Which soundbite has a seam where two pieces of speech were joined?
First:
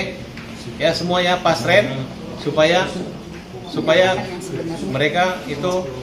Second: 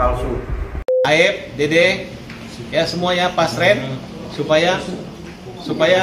second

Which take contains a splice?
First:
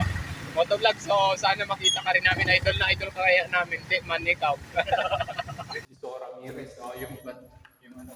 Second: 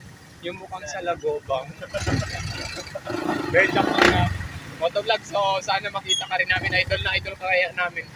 first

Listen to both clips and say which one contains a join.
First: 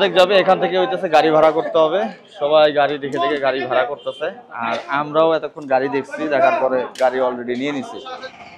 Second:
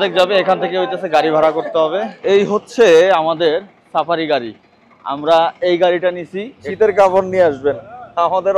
second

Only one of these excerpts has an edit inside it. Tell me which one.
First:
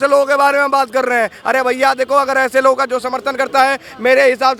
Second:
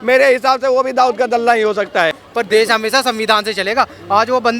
second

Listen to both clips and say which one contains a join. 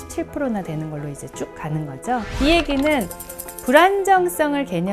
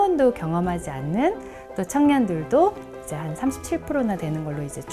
first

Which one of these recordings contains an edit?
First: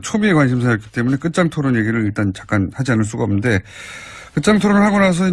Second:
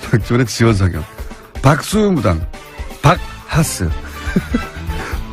first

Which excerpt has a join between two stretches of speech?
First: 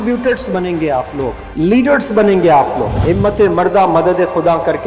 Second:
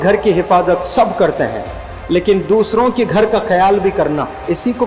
first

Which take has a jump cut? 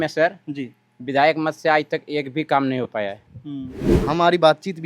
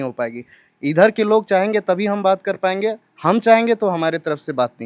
first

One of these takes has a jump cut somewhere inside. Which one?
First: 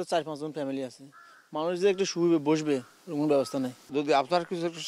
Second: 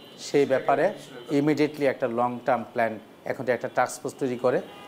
first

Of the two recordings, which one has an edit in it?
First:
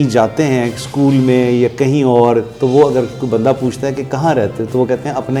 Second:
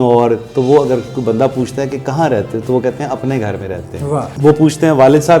second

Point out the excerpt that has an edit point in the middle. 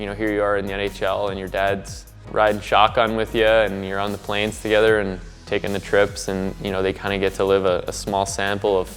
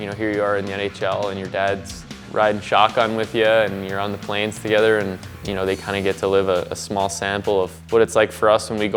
second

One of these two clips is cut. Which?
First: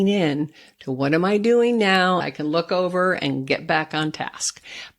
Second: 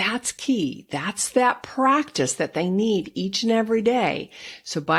first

